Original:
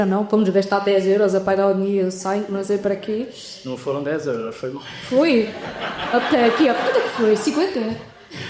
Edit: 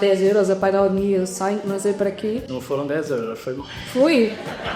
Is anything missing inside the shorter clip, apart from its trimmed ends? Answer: yes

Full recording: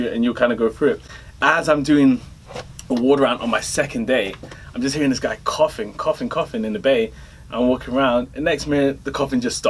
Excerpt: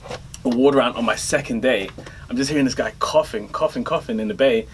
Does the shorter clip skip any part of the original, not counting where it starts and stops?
no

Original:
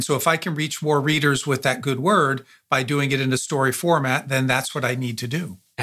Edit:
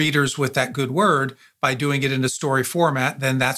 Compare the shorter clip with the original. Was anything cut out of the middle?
no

